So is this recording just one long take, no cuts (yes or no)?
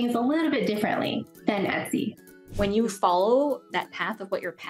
no